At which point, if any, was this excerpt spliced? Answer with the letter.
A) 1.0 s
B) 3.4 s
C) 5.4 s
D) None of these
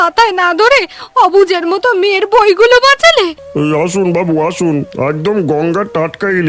B